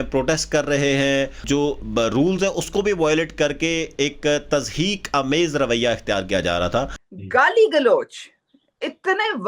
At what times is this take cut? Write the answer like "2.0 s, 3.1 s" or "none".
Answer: 1.4 s, 7.0 s